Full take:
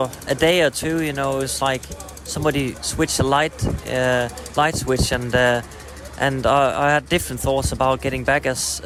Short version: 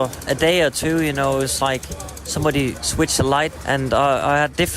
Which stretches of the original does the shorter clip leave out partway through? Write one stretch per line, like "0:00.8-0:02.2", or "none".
0:03.6-0:06.1